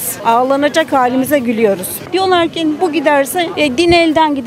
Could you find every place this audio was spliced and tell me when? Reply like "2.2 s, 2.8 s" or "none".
2.1 s